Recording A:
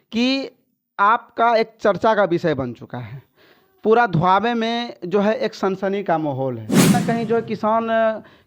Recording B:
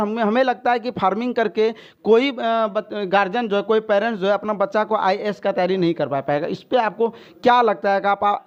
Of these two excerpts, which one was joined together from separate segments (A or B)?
A